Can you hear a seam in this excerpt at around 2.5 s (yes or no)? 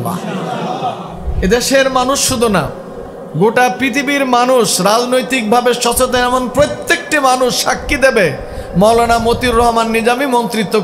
no